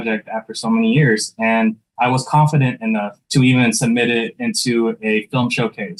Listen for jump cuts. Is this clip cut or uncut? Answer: uncut